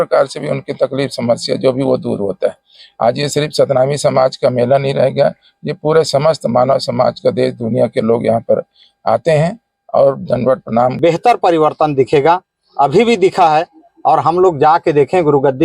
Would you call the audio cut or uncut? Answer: cut